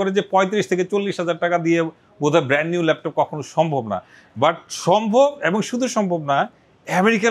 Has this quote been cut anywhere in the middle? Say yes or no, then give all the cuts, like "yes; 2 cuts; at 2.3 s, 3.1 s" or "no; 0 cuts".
no; 0 cuts